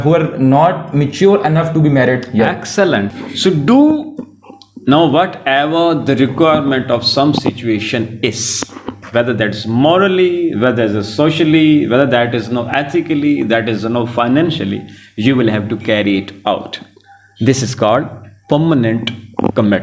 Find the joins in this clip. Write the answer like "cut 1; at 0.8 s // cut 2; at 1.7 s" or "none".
cut 1; at 3.1 s